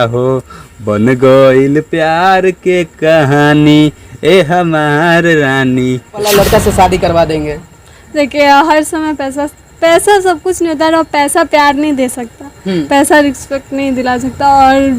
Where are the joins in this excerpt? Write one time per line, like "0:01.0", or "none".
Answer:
0:06.3